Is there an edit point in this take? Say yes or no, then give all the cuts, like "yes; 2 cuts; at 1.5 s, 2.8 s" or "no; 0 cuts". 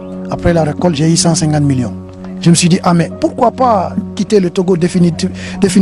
no; 0 cuts